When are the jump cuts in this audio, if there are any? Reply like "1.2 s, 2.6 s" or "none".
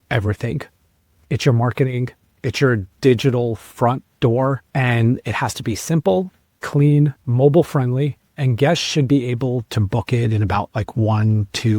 4.6 s, 7.2 s, 8.4 s